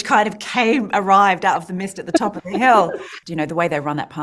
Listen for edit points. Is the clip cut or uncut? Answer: cut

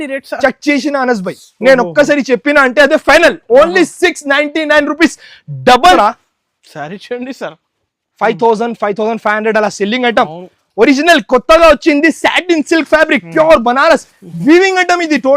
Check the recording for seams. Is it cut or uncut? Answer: cut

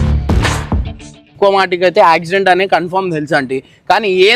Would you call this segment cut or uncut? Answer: cut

